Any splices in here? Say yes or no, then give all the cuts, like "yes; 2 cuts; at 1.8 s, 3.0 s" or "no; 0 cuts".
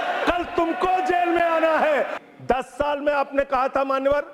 yes; 1 cut; at 2.2 s